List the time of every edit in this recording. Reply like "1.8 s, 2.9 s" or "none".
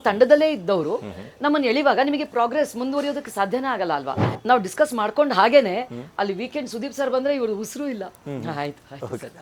4.2 s